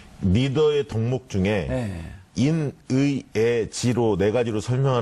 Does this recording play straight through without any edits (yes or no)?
no